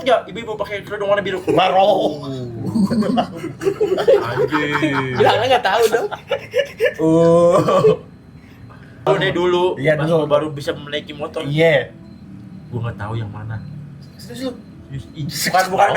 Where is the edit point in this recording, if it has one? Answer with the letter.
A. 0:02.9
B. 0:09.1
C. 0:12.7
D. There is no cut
B